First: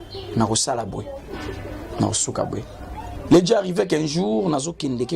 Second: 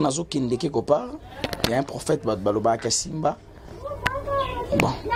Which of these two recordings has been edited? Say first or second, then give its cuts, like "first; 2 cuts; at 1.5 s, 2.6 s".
first; 1 cut; at 3.1 s